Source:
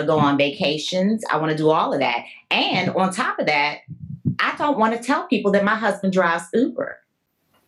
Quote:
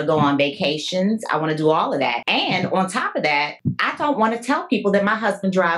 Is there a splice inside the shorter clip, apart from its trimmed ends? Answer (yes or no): yes